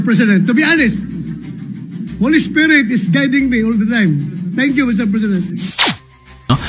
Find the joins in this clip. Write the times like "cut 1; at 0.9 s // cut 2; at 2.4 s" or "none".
cut 1; at 3.9 s